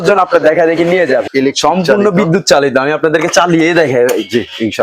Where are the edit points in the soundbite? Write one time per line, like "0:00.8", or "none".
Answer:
0:01.3